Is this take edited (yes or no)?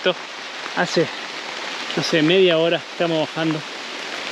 no